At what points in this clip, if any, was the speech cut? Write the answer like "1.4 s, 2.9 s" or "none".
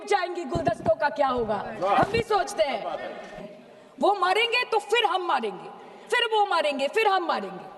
3.5 s